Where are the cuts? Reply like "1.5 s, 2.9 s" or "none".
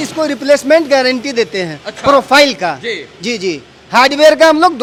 none